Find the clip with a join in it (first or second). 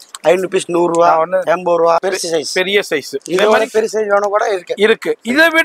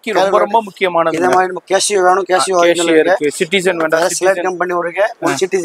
first